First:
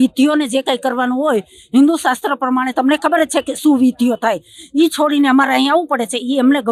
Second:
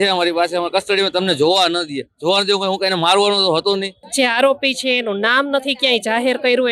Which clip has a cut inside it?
second; 1 cut; at 4.0 s

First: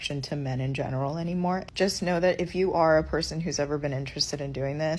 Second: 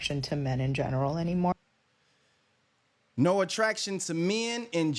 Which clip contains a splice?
first; 1 cut; at 1.5 s

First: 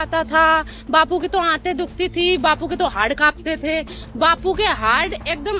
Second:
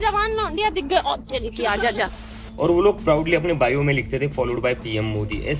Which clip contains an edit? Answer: second; 1 cut; at 2.2 s

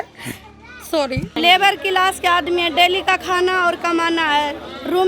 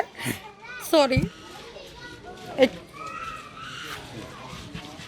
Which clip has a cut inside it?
first; 1 cut; at 1.3 s

